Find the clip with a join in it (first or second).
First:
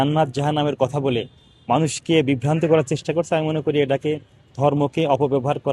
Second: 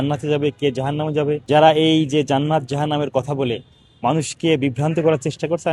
second